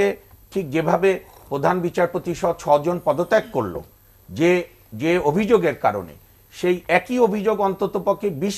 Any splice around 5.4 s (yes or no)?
no